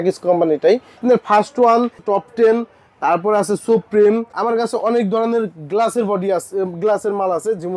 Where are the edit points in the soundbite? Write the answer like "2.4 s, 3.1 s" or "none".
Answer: 1.0 s, 2.0 s, 4.3 s